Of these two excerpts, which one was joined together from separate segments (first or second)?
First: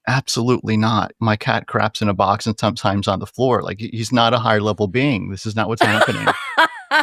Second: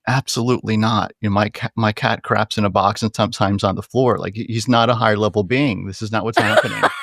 first